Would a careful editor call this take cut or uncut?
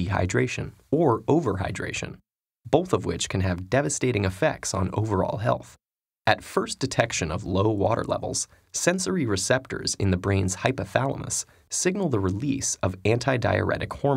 uncut